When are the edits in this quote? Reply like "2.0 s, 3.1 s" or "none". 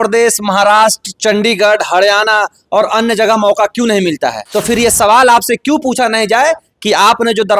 4.4 s